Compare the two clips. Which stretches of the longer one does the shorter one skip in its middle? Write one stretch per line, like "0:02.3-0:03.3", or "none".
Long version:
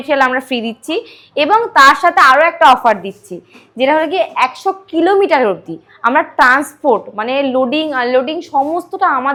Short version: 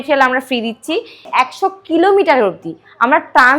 0:01.3-0:04.3